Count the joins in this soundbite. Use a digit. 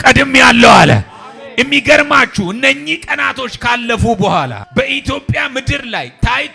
1